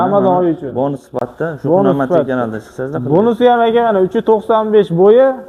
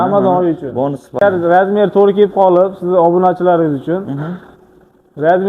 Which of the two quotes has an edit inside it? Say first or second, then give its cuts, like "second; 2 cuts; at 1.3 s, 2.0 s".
second; 1 cut; at 1.2 s